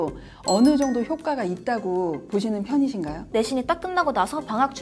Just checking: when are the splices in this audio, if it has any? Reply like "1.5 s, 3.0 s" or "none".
3.3 s